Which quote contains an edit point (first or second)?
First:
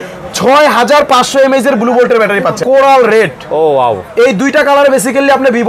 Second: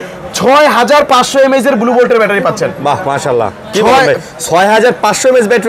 first